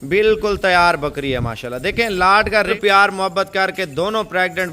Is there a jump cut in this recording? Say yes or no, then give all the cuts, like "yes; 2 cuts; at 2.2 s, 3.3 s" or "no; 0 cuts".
yes; 1 cut; at 2.7 s